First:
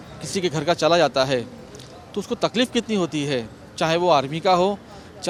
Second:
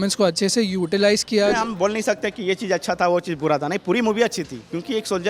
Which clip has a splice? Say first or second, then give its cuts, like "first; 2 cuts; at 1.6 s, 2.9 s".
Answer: second; 1 cut; at 1.5 s